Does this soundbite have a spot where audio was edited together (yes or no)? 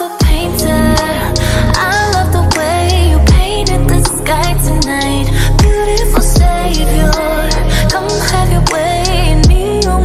no